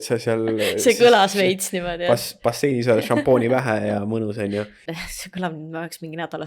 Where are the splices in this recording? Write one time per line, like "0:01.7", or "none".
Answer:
0:04.9